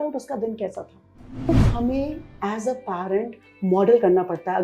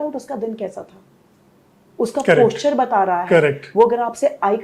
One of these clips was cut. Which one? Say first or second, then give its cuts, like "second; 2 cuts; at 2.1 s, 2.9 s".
first; 1 cut; at 1.5 s